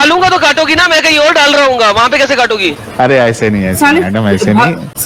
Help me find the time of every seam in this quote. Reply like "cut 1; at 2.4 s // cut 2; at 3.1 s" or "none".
none